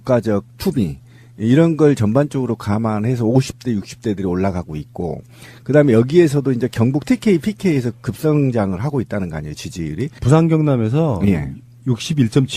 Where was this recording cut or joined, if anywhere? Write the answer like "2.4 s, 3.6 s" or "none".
10.5 s